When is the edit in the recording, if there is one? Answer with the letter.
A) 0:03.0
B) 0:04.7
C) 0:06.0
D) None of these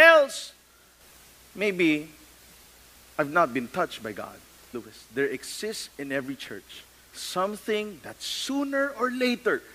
B